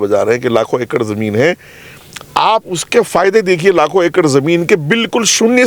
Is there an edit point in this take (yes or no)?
no